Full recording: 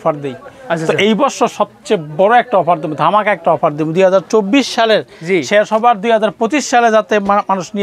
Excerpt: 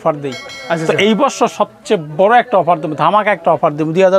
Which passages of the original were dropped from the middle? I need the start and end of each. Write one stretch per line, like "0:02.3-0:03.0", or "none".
none

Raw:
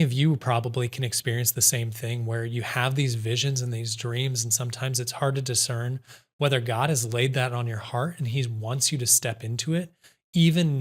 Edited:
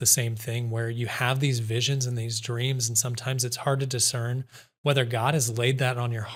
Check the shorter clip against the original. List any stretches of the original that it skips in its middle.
none

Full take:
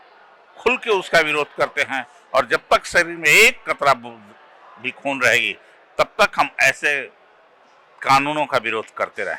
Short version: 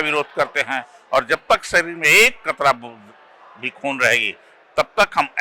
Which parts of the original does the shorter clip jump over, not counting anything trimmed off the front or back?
none

